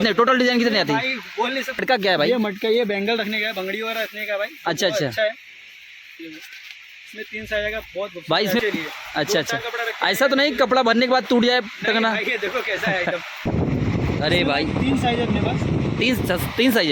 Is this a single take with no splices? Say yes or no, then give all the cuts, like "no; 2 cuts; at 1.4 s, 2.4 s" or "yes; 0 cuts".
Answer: no; 3 cuts; at 1.8 s, 8.6 s, 13.5 s